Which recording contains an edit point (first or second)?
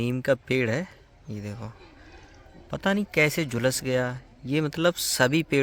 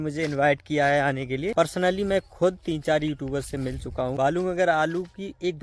second